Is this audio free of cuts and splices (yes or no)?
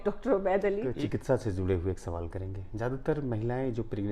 no